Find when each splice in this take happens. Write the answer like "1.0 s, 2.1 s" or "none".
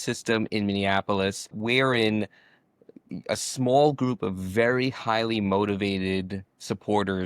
1.6 s